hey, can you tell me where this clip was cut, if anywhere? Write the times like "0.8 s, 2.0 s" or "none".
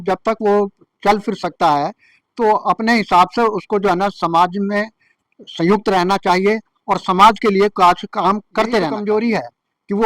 9.0 s